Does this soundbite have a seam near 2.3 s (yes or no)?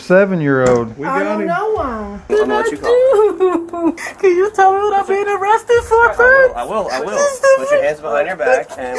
yes